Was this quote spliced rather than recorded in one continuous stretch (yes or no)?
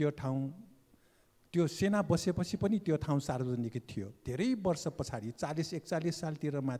no